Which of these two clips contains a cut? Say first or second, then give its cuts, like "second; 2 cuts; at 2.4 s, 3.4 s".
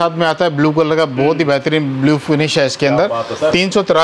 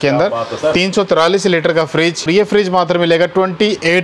second; 1 cut; at 2.3 s